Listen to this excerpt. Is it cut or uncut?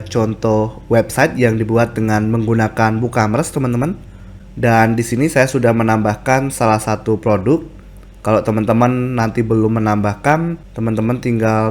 uncut